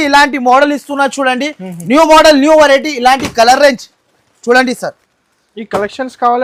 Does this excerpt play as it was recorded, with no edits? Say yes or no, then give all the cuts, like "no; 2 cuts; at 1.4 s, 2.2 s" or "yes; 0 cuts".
yes; 0 cuts